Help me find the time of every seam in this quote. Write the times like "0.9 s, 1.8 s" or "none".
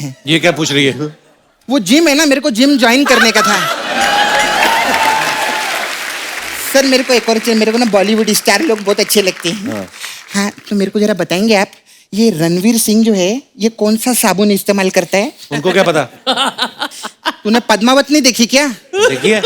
none